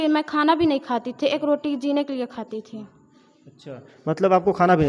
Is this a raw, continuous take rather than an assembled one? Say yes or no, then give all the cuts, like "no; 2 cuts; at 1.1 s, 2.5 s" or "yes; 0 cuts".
yes; 0 cuts